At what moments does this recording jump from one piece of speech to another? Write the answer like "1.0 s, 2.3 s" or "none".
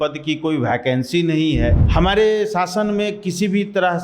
1.8 s